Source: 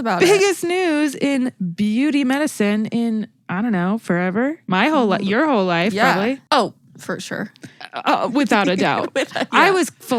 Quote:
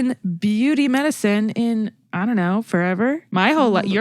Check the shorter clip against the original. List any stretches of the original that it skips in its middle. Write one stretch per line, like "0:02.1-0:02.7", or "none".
none